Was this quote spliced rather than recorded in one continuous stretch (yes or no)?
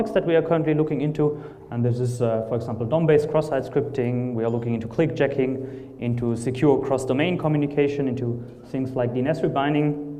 yes